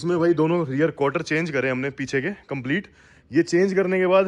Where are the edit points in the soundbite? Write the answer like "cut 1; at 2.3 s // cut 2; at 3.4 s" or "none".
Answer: none